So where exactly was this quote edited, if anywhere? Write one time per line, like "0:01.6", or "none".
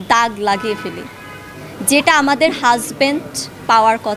none